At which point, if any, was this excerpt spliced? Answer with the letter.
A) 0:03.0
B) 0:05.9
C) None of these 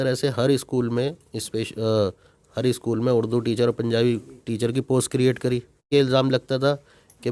B